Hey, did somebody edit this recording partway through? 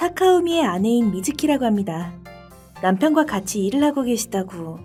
no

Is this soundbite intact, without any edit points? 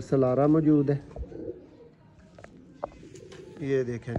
yes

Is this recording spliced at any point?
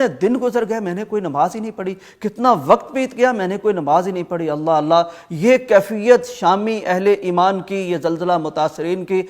no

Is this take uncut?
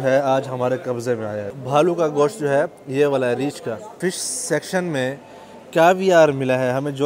no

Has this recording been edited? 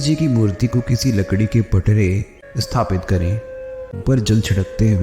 yes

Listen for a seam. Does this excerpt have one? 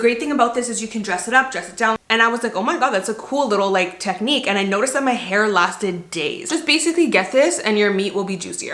yes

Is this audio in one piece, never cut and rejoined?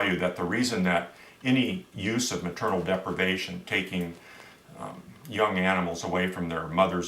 no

